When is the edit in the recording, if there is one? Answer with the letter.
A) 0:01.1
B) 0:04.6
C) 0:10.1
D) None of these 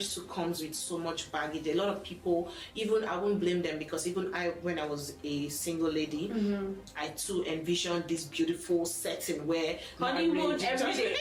D